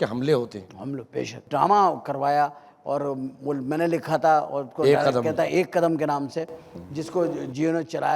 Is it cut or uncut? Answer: cut